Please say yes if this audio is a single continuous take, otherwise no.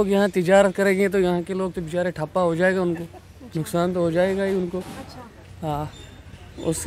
yes